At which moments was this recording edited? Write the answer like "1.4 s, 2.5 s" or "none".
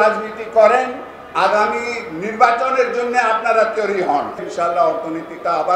4.4 s